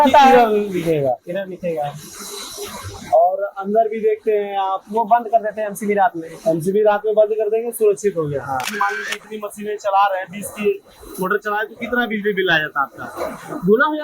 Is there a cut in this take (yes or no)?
yes